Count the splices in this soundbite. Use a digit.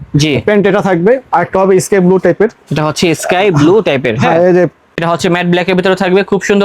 1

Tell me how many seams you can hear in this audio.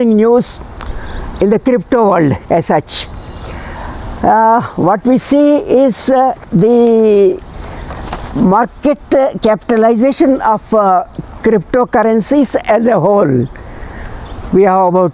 0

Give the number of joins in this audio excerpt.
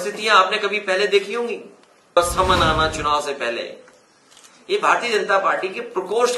1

